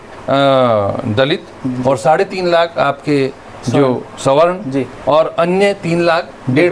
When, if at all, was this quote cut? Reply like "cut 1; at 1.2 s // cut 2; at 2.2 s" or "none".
none